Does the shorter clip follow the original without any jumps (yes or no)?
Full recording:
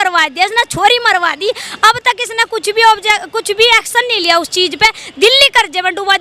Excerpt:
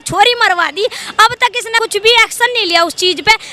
no